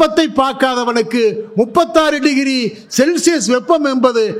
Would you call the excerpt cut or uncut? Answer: uncut